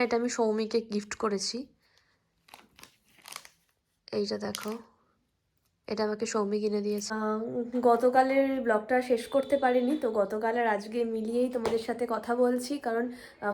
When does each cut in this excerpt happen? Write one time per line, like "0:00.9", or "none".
0:07.1